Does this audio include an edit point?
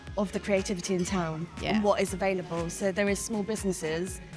no; 0 cuts

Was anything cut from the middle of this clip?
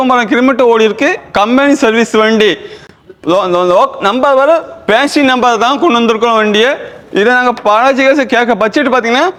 no; 0 cuts

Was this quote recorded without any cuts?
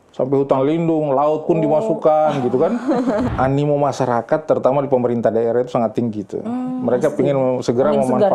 no; 1 cut; at 3.3 s

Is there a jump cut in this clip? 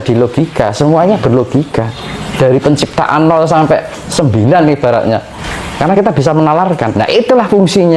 yes; 1 cut; at 5.9 s

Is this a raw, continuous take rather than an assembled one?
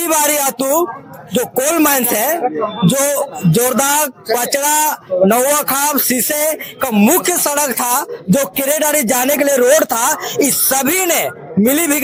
yes; 0 cuts

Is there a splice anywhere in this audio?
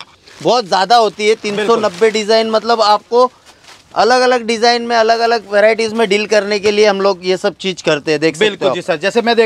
no; 0 cuts

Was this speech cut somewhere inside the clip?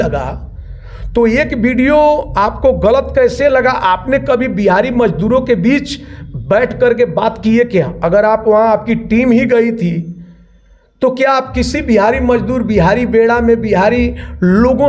no; 0 cuts

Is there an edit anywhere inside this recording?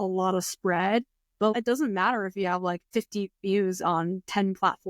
yes; 2 cuts; at 1.5 s, 2.9 s

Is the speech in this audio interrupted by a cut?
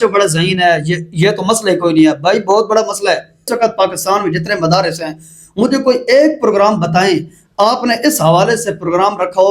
yes; 1 cut; at 3.5 s

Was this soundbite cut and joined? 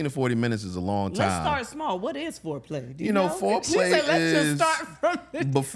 no; 0 cuts

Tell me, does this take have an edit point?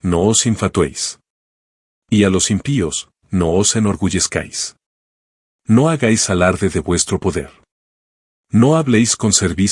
no; 0 cuts

